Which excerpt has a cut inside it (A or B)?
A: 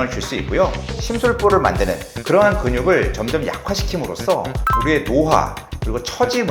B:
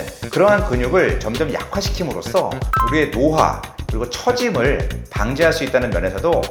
A